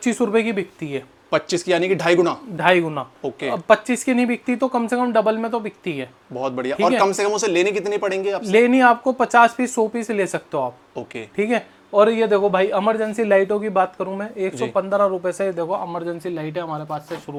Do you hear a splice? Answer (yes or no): no